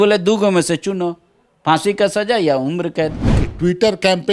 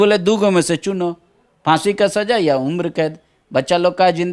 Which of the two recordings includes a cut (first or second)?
first